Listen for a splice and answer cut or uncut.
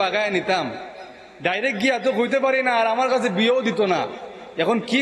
uncut